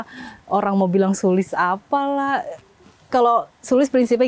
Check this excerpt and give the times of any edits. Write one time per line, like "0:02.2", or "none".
0:02.6